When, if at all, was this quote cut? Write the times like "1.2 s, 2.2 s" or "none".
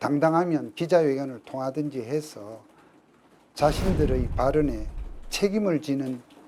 none